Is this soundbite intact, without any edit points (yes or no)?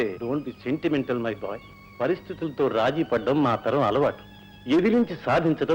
yes